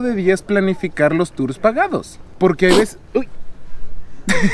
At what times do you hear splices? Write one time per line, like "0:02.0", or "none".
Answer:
none